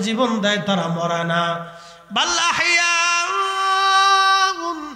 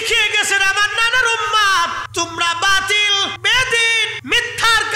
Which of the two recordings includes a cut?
second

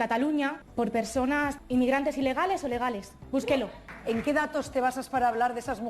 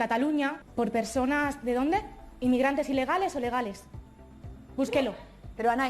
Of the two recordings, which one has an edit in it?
first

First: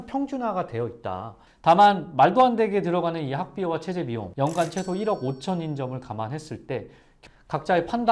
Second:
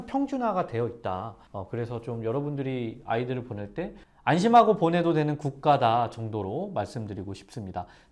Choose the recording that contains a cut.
first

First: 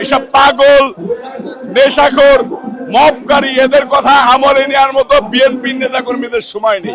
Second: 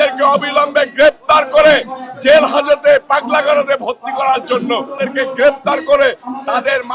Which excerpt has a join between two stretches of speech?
second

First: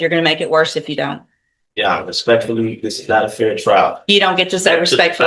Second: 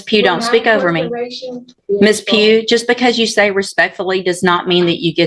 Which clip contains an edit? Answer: second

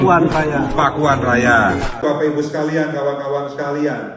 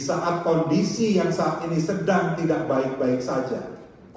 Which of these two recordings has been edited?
first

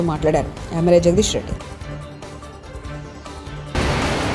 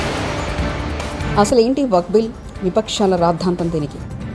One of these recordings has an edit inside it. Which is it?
second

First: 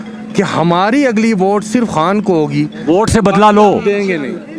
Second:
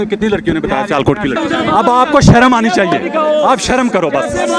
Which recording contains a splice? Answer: second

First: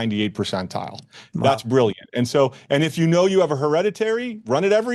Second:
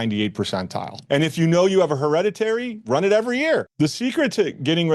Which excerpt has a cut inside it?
second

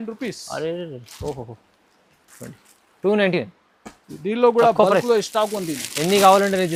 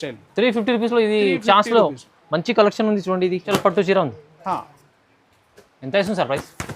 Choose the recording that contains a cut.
second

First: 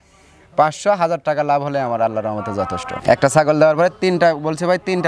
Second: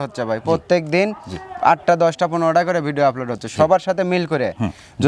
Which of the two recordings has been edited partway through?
first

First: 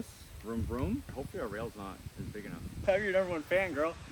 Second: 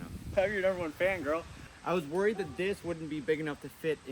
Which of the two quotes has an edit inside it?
first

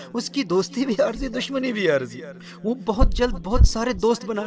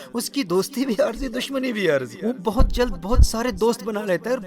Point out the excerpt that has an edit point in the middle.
second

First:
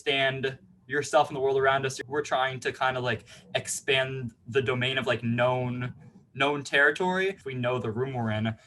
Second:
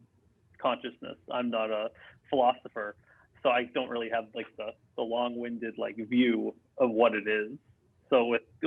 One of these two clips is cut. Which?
first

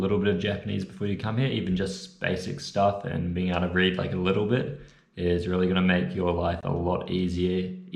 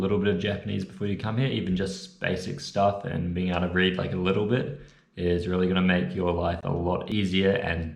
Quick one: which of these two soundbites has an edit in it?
second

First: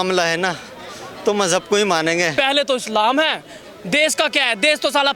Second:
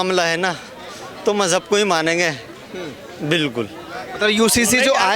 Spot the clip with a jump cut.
first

